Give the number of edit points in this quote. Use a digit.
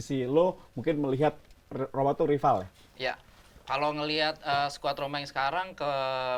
0